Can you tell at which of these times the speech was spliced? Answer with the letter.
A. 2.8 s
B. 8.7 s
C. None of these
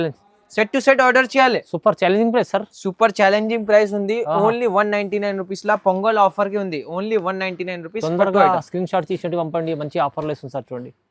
C